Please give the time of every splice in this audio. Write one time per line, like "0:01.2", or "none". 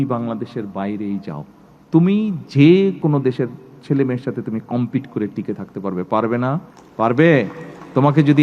0:03.0
0:06.8